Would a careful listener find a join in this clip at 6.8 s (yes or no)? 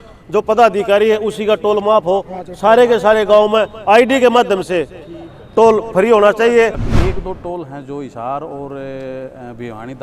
yes